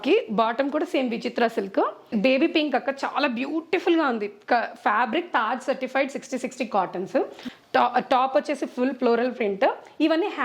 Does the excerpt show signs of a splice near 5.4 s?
no; 2 cuts; at 2.1 s, 7.4 s

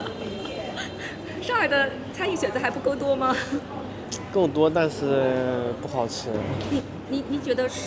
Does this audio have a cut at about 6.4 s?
no; 0 cuts

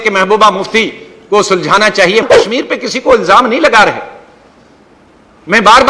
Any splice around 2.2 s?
yes; 1 cut; at 2.2 s

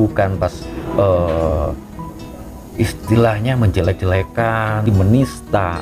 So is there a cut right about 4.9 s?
yes; 1 cut; at 4.9 s

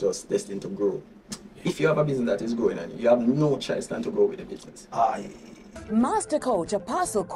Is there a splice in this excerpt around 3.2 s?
no; 2 cuts; at 1.5 s, 5.7 s

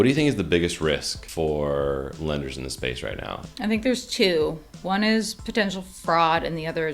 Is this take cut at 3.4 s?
yes; 2 cuts; at 1.2 s, 3.4 s

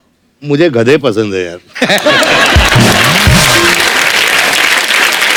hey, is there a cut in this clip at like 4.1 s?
no; 0 cuts

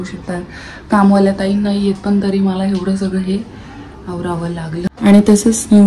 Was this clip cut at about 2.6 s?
no; 1 cut; at 4.9 s

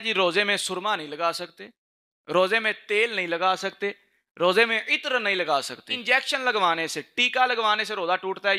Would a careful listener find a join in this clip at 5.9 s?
yes; 1 cut; at 5.9 s

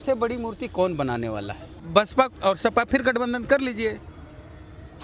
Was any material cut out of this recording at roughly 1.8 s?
yes; 1 cut; at 1.8 s

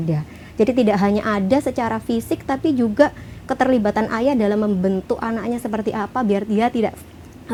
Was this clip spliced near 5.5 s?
no; 0 cuts

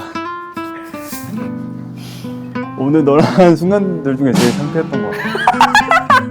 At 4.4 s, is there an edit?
no; 1 cut; at 2.7 s

